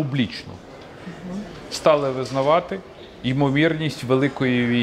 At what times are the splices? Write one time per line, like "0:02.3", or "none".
none